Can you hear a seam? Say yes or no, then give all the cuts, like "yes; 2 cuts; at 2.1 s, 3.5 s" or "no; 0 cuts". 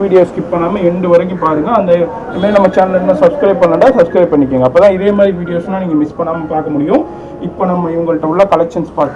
no; 0 cuts